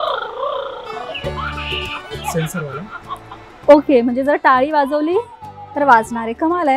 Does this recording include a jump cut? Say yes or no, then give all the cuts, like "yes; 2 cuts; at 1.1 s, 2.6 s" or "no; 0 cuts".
no; 0 cuts